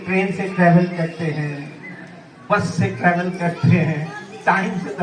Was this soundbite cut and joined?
no; 0 cuts

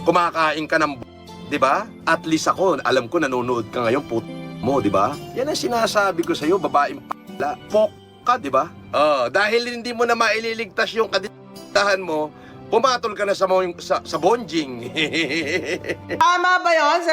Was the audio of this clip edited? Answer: yes; 1 cut; at 16.2 s

